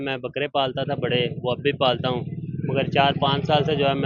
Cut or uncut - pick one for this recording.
uncut